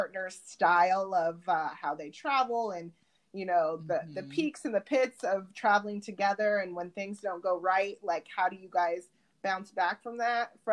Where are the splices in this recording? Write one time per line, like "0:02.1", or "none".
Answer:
none

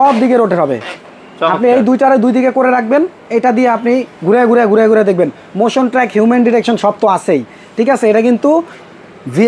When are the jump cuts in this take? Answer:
none

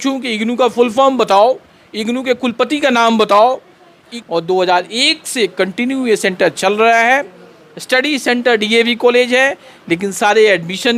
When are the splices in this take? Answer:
0:04.1

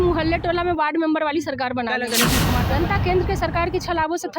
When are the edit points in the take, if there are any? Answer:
0:02.5

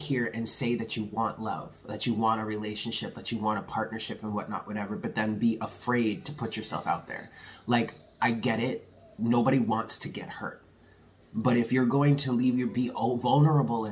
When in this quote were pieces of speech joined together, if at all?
none

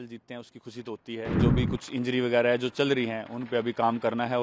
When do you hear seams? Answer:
0:01.4

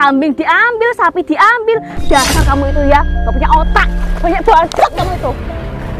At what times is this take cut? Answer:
0:04.0

